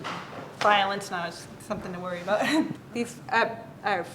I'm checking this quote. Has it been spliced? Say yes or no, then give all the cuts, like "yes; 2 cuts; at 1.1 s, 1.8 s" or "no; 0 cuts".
yes; 1 cut; at 2.7 s